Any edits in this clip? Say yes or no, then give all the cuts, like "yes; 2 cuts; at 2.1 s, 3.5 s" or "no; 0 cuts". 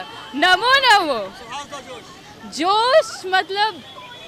no; 0 cuts